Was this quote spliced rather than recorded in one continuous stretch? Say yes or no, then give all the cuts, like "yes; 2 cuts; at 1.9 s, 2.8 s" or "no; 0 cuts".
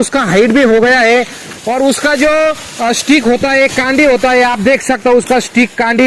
no; 0 cuts